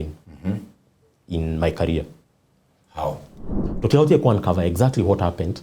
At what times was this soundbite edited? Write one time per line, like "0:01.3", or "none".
0:03.6

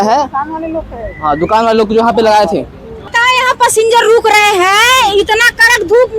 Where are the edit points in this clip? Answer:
0:03.1

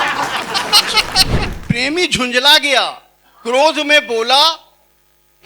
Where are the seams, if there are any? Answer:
0:01.4

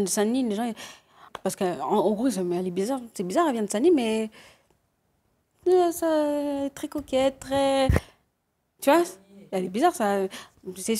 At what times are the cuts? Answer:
0:01.3

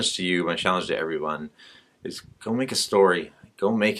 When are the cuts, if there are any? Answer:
none

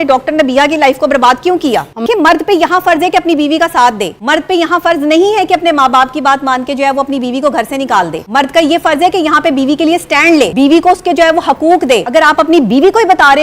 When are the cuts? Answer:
0:02.0
0:04.1
0:08.2
0:10.5
0:12.1

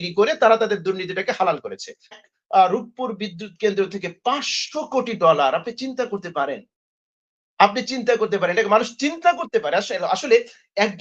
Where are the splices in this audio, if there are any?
0:02.2

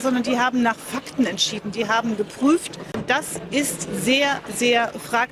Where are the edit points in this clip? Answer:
0:03.0

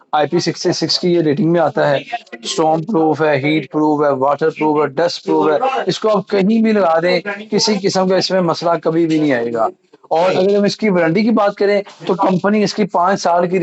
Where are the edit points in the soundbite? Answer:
none

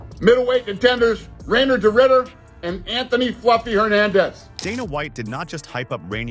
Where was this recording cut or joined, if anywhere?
none

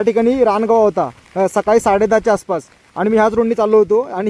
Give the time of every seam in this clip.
none

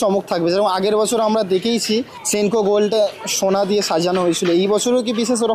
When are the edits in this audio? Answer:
0:02.2

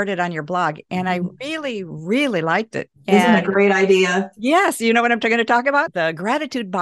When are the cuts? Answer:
0:05.9

